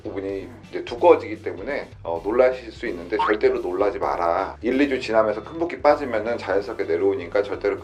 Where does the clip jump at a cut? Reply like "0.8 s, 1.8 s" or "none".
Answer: none